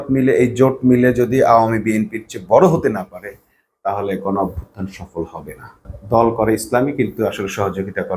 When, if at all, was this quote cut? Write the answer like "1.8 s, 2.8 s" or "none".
5.9 s